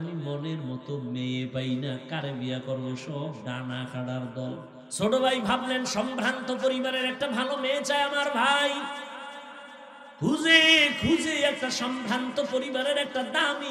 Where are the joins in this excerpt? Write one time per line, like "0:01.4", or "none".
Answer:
0:04.8

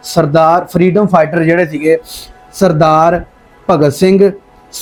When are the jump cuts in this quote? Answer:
none

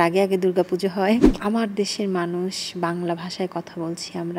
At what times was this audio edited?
0:01.3

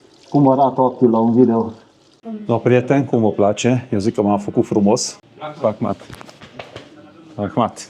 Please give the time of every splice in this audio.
0:02.2
0:05.1

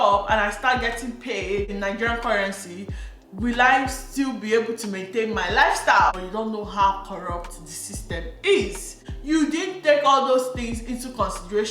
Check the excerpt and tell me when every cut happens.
0:06.2

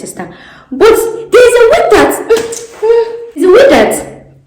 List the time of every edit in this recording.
0:03.4

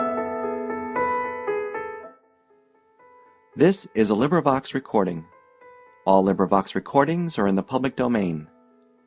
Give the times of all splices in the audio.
none

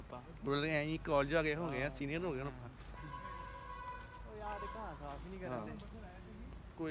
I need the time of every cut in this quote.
none

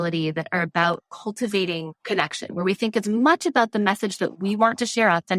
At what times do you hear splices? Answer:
0:01.9

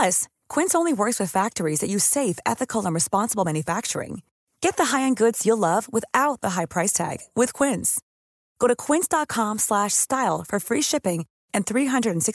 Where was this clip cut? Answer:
none

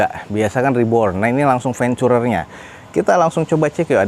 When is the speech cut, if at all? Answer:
none

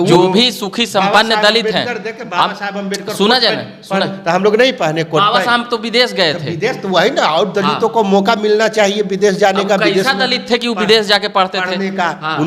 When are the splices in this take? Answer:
none

